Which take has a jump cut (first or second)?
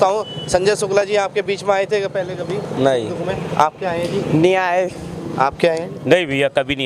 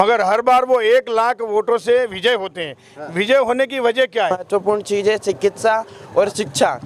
second